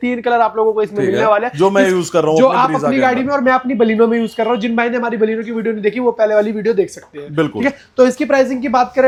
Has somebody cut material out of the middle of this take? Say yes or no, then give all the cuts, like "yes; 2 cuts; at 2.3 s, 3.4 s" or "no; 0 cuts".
no; 0 cuts